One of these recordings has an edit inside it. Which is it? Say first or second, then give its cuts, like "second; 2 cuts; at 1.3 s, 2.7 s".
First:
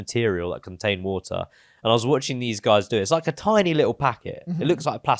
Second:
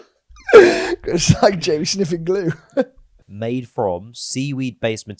second; 1 cut; at 3.3 s